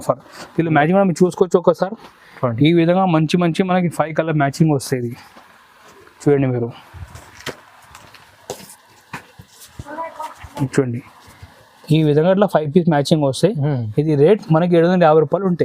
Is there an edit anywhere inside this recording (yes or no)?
no